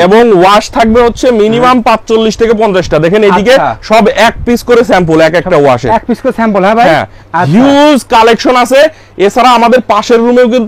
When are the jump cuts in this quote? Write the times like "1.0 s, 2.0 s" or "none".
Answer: none